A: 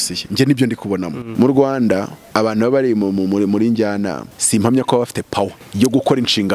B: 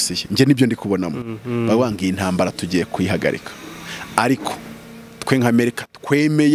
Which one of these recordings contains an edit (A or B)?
A